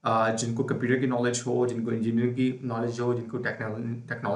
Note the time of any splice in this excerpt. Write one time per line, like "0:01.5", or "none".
none